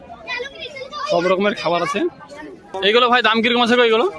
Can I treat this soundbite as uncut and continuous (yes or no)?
no